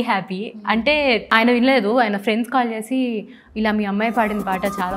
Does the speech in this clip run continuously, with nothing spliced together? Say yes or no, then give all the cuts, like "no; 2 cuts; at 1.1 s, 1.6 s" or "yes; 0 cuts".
no; 1 cut; at 1.3 s